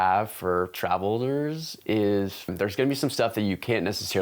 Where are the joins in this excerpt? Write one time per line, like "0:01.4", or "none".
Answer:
0:02.5